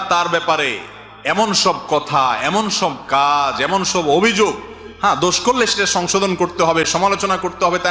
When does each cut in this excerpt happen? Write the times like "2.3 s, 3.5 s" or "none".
none